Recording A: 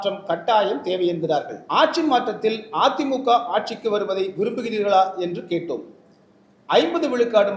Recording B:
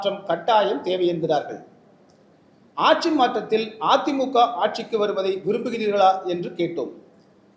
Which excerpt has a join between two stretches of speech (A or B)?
A